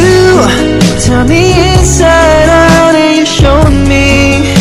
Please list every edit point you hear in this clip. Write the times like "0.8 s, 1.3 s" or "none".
none